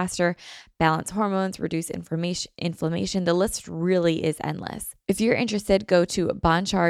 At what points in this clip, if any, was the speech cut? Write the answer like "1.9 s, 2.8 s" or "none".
4.9 s